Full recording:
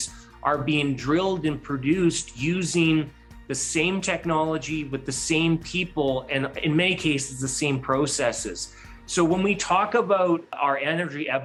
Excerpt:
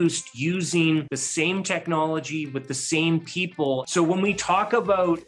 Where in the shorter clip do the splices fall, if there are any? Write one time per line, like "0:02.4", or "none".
0:01.2
0:03.9